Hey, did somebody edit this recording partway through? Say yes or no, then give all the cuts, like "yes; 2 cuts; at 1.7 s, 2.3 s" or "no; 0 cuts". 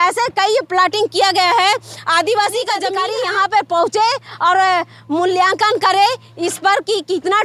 yes; 1 cut; at 3.0 s